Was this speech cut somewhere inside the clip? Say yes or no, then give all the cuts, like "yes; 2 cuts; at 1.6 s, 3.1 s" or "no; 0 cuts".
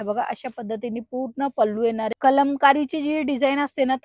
yes; 1 cut; at 2.1 s